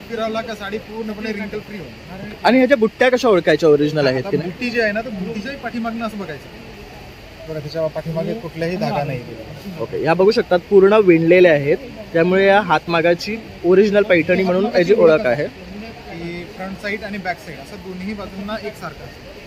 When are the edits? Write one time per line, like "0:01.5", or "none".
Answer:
none

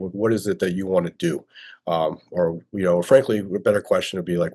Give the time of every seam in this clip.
none

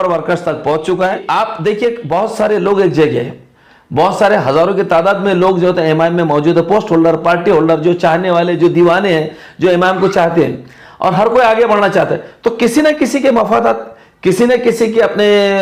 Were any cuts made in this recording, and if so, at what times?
0:01.2

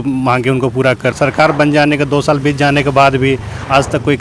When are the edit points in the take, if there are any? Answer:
0:01.1

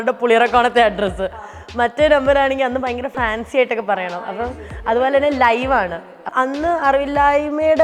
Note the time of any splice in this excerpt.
0:06.3

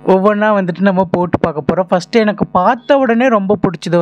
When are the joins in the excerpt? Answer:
none

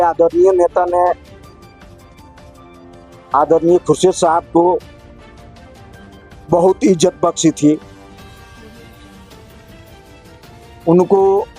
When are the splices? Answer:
0:01.2
0:03.3
0:04.8
0:06.4

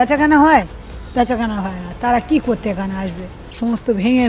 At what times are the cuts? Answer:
0:03.2

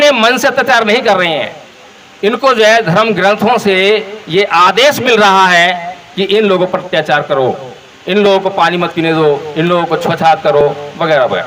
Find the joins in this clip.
none

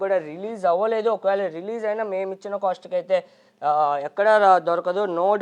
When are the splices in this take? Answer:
none

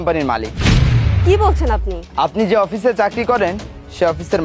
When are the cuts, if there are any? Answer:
none

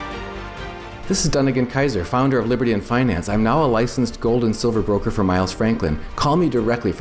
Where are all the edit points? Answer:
0:00.9

